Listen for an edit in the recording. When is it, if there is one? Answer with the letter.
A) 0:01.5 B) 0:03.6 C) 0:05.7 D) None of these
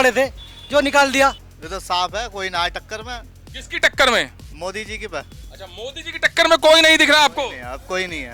A